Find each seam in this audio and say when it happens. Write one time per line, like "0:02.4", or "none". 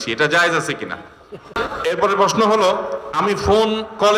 0:01.5